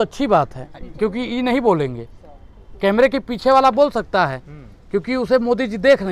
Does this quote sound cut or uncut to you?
uncut